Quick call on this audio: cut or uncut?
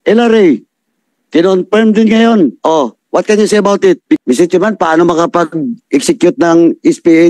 cut